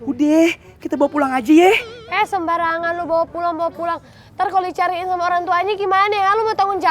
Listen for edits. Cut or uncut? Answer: uncut